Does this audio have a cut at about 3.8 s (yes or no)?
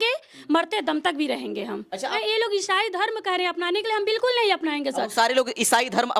no